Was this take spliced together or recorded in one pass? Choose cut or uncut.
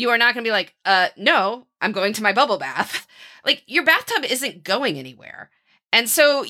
cut